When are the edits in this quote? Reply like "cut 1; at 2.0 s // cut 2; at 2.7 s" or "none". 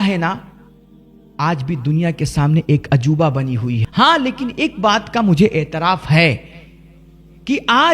cut 1; at 3.8 s